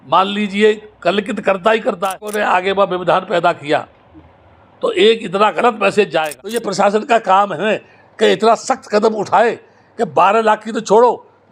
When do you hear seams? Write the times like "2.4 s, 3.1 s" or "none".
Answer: 2.3 s, 6.5 s